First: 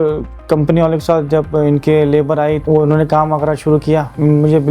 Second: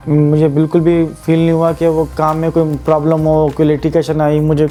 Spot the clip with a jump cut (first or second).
first